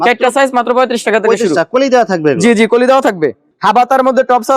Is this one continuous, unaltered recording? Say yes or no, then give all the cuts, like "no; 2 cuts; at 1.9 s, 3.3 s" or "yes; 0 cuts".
no; 1 cut; at 3.5 s